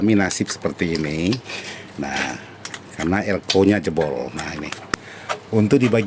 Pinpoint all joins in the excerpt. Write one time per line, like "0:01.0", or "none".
0:04.8